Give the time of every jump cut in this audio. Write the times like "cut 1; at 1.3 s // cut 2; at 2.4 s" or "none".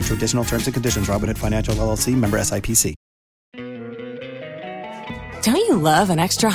cut 1; at 3.4 s